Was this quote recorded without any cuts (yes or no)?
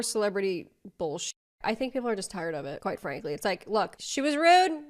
yes